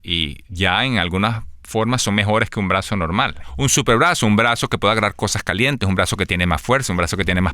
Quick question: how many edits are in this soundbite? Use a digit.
1